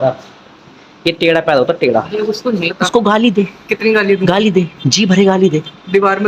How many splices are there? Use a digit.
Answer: 1